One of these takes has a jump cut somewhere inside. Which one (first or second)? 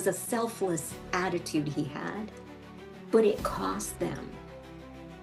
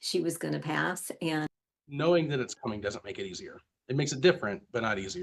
second